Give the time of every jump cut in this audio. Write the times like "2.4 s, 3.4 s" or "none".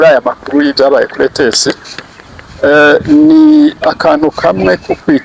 none

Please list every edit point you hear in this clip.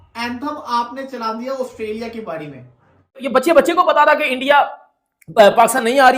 3.2 s

